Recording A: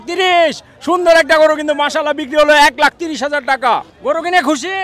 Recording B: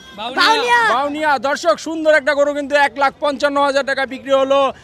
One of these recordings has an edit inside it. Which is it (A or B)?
A